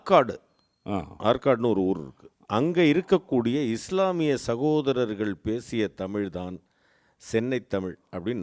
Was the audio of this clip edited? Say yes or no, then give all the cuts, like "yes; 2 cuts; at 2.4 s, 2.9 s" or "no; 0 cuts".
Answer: no; 0 cuts